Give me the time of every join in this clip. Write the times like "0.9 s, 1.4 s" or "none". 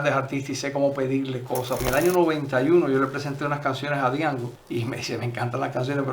1.8 s, 4.6 s